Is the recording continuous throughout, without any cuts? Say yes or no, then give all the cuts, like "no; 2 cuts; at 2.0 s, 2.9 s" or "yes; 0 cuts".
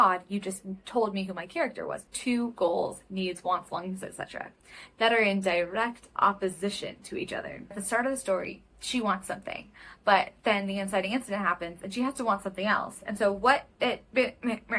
no; 2 cuts; at 2.0 s, 7.8 s